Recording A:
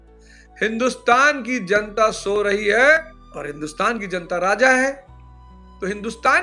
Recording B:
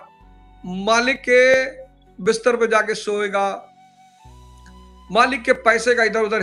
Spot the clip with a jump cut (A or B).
A